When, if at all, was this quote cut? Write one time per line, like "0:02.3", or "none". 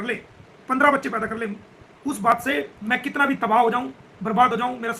0:02.8

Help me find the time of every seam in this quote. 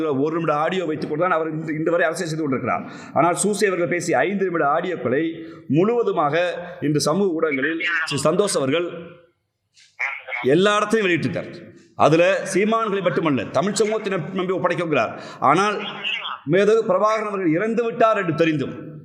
none

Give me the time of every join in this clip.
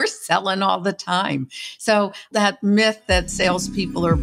0:02.3

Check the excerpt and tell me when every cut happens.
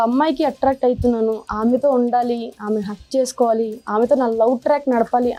none

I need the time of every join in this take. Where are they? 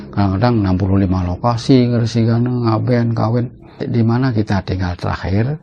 0:03.8

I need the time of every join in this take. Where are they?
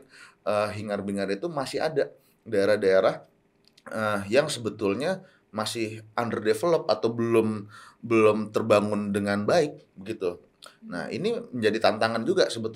none

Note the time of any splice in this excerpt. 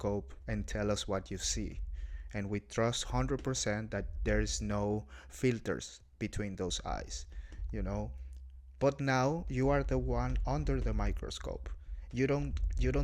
none

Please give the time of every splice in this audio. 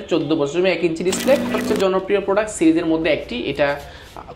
0:01.5

